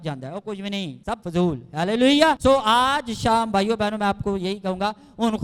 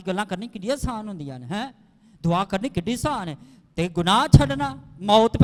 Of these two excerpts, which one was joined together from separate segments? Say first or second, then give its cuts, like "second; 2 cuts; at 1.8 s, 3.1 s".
first; 2 cuts; at 1.1 s, 2.4 s